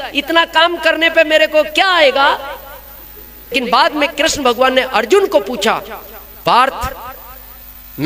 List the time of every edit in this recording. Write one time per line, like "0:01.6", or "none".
0:03.5